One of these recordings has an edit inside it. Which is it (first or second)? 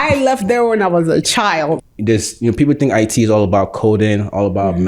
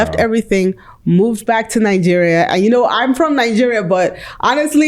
first